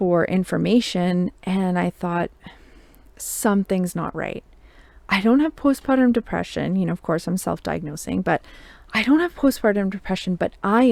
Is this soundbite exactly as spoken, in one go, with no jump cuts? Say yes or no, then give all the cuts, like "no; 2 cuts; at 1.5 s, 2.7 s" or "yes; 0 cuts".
yes; 0 cuts